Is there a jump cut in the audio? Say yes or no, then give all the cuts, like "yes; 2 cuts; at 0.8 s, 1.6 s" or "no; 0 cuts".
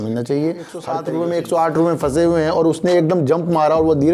yes; 1 cut; at 1.0 s